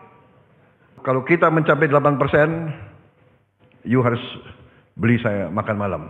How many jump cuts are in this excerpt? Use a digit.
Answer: 1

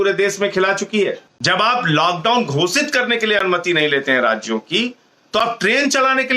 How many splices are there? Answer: 1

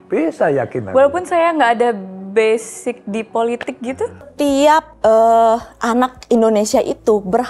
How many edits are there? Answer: 1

